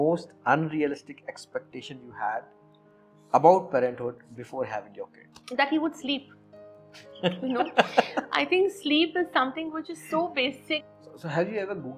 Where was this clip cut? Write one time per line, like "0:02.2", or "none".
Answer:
0:10.8